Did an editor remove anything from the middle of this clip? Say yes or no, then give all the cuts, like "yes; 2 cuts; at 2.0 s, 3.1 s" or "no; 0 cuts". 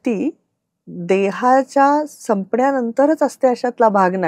no; 0 cuts